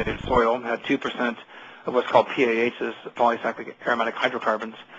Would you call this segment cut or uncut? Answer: cut